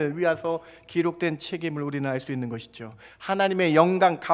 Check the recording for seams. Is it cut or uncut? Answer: uncut